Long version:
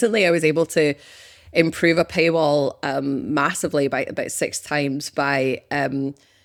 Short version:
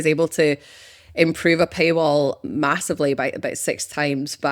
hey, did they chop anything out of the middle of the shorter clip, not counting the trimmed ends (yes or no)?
yes